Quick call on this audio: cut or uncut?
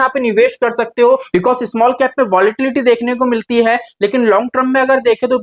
cut